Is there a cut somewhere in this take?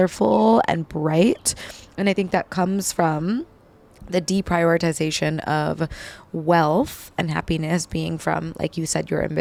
no; 0 cuts

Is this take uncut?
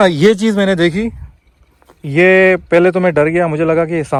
yes; 0 cuts

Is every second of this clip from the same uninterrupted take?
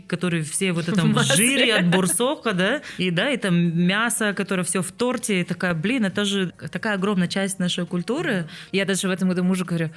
no; 3 cuts; at 2.9 s, 6.5 s, 8.6 s

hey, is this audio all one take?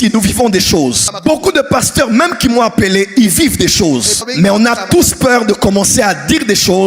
no; 2 cuts; at 1.1 s, 4.2 s

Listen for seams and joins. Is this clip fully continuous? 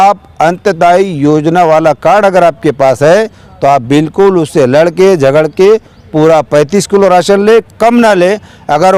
yes; 0 cuts

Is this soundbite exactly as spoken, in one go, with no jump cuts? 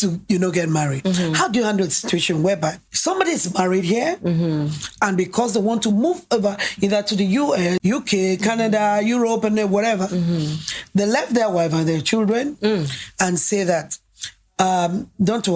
no; 2 cuts; at 1.0 s, 2.9 s

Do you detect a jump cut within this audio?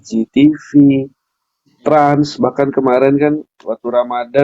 no; 0 cuts

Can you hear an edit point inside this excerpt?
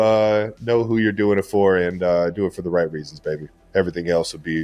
no; 0 cuts

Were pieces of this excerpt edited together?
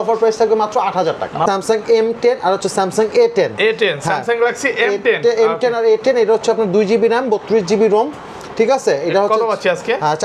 yes; 1 cut; at 1.4 s

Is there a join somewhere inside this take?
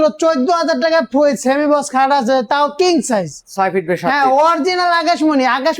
no; 0 cuts

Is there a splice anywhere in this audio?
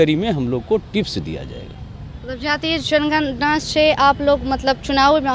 no; 0 cuts

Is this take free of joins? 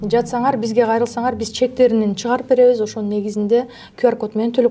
yes; 0 cuts

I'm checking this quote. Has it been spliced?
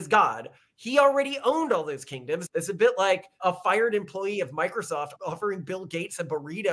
yes; 3 cuts; at 2.4 s, 3.4 s, 5.1 s

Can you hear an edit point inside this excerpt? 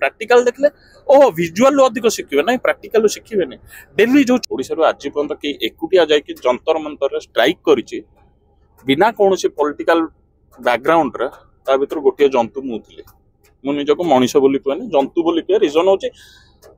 yes; 1 cut; at 4.4 s

